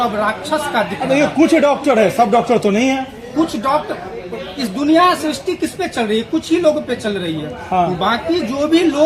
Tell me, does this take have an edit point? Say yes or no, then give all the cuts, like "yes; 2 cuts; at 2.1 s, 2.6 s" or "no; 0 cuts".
no; 0 cuts